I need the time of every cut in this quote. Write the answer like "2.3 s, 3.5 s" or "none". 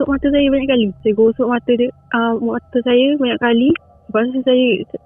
1.0 s, 4.0 s